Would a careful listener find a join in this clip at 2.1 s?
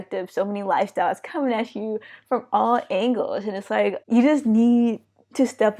no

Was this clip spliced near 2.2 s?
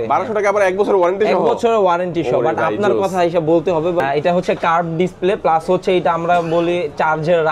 no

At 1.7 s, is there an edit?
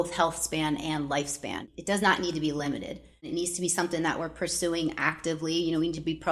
yes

